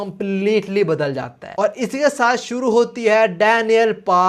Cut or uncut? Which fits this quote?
cut